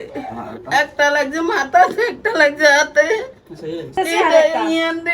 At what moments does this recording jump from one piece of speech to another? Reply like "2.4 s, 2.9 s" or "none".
3.9 s

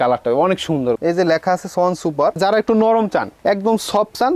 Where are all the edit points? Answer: 1.0 s, 2.4 s

